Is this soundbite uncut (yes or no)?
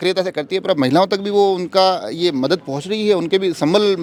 yes